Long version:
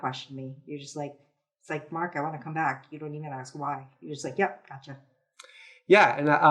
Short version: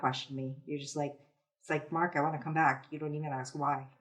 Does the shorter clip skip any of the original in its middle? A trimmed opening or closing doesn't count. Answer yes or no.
no